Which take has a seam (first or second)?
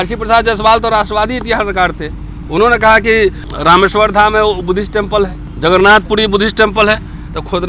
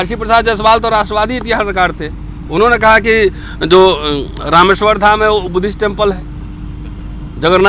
first